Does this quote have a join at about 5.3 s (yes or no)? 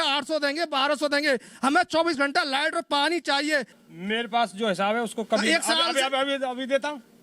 no